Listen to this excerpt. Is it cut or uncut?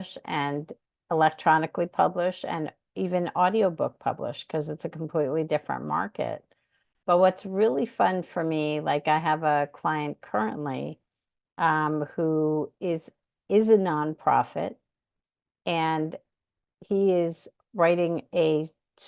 uncut